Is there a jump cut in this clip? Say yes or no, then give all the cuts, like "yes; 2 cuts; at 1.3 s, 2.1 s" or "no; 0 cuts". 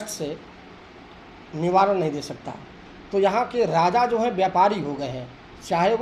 no; 0 cuts